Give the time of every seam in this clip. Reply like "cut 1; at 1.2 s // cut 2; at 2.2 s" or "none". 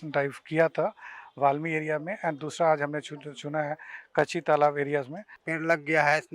cut 1; at 5.2 s